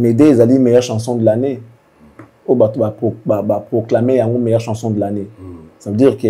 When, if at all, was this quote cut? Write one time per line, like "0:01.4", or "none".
none